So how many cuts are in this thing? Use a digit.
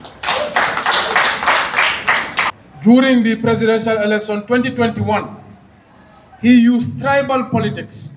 1